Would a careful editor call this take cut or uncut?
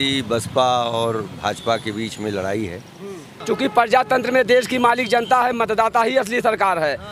cut